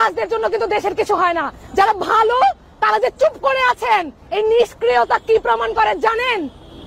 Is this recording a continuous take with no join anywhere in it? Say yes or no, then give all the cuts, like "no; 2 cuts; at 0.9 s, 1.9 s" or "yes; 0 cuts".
yes; 0 cuts